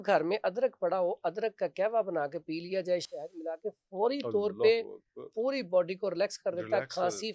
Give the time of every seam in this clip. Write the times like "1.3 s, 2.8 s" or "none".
none